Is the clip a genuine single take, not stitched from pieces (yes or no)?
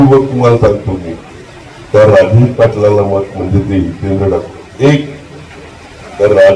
yes